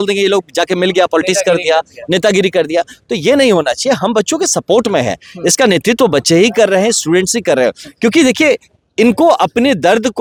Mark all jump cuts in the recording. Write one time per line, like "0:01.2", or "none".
none